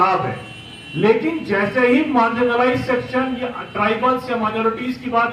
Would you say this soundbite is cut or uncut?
uncut